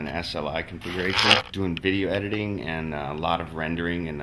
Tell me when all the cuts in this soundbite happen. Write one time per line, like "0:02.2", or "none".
0:01.5

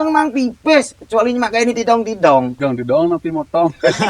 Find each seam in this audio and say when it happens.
0:02.5

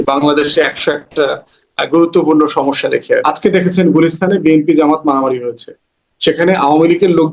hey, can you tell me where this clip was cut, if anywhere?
0:03.3

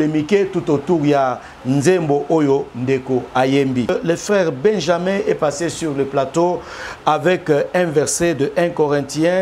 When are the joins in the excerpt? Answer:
0:03.9

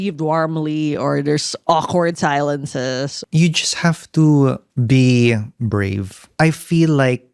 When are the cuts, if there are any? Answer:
0:01.5
0:03.2
0:04.7
0:05.5

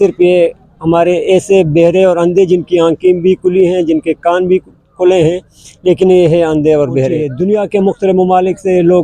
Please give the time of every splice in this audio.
0:07.3

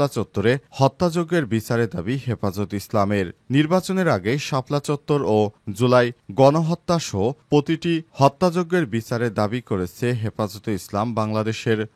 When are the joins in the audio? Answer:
none

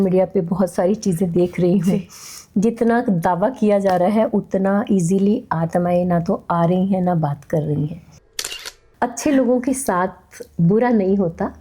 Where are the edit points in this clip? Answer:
0:08.3

